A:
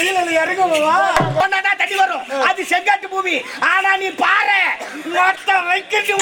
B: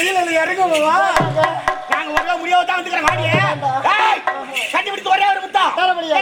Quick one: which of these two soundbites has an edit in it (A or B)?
A